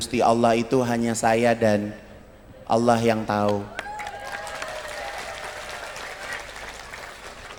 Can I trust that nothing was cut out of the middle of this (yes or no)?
yes